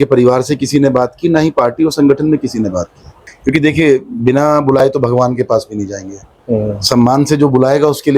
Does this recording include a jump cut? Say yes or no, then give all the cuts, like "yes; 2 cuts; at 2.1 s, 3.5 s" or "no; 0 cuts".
yes; 1 cut; at 3.3 s